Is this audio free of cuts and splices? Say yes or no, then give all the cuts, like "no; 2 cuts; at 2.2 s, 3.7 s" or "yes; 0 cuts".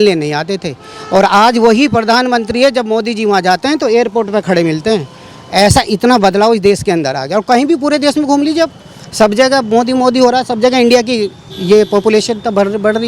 yes; 0 cuts